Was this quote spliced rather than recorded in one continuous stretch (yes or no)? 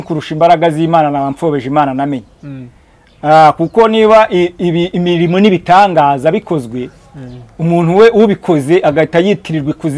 no